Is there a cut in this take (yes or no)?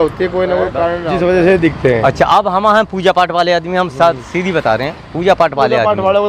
yes